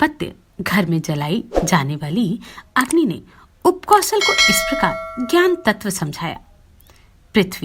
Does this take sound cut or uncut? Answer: cut